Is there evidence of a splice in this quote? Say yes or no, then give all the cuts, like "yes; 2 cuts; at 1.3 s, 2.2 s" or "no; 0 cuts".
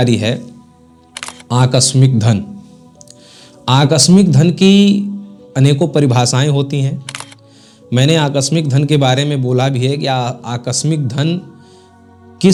no; 0 cuts